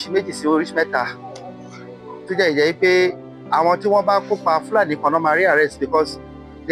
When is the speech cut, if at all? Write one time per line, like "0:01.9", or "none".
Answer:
none